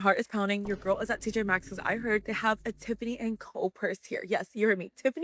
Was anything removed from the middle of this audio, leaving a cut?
no; 0 cuts

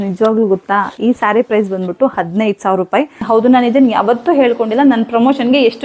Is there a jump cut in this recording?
yes; 1 cut; at 3.2 s

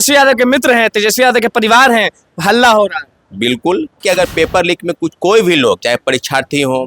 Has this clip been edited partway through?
yes; 1 cut; at 4.0 s

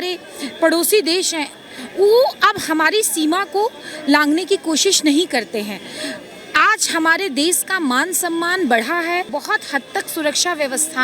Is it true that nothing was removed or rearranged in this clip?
no; 1 cut; at 9.3 s

